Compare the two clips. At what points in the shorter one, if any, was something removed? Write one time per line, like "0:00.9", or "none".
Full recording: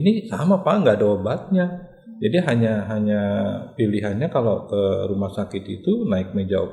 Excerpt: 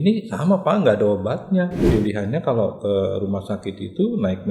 0:01.8